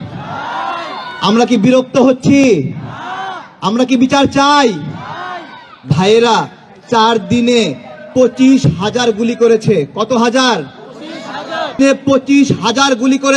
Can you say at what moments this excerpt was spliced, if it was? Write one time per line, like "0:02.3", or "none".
0:11.8